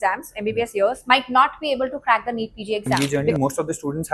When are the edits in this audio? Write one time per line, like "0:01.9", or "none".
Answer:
0:02.9

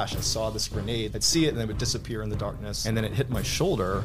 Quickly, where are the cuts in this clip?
0:01.1
0:02.7

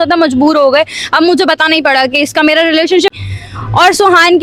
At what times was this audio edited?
0:03.1

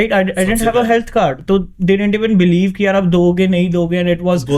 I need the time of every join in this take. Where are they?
none

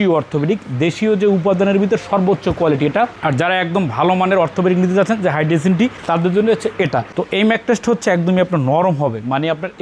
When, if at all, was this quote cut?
0:07.1

